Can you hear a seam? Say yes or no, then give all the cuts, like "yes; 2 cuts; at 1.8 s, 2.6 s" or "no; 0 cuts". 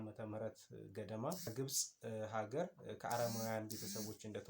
yes; 1 cut; at 1.5 s